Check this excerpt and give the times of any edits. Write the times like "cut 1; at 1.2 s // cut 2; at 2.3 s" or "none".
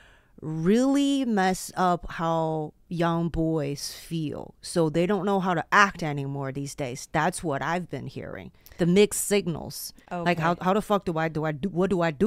none